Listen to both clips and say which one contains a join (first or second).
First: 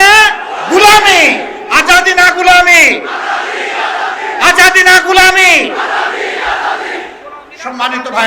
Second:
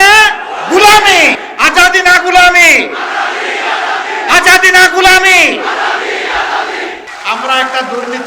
second